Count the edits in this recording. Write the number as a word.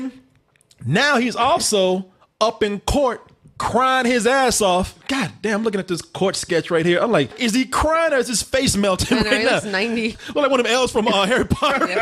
three